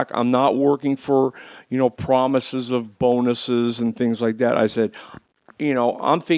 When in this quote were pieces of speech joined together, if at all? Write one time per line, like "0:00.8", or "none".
0:03.1